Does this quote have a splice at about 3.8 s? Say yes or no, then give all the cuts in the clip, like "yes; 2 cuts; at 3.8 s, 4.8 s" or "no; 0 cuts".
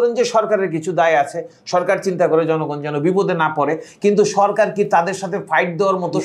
no; 0 cuts